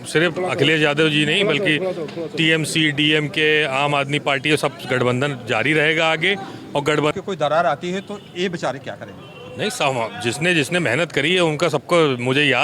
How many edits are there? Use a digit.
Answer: 1